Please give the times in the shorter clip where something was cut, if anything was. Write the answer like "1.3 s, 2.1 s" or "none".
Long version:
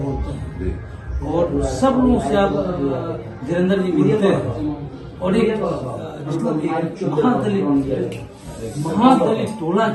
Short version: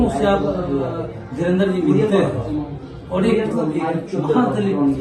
3.5 s